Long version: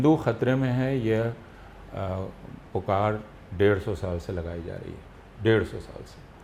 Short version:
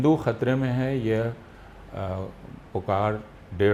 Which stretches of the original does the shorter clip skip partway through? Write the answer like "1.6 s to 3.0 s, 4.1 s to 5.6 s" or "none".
none